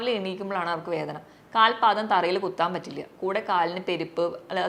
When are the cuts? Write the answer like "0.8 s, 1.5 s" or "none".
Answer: none